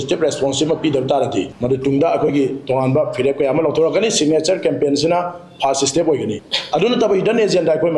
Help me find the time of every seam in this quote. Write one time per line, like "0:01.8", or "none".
0:01.5
0:06.5